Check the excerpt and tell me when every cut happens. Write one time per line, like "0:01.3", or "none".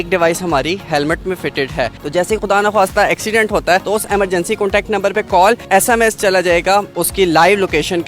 0:01.9
0:03.8
0:05.6
0:06.9